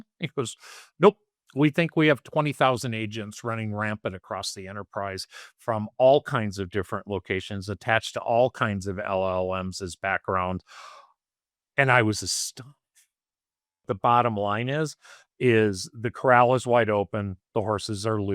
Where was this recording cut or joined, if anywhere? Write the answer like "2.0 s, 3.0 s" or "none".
13.8 s